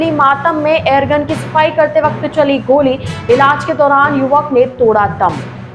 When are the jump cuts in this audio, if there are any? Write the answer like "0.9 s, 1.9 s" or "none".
none